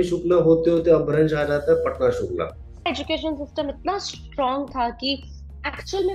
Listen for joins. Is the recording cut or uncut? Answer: cut